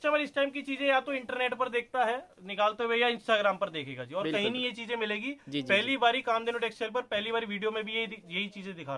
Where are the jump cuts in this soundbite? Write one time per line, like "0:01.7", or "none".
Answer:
none